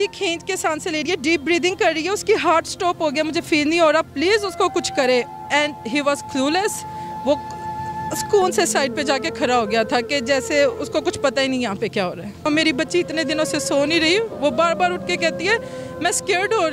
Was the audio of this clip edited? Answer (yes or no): yes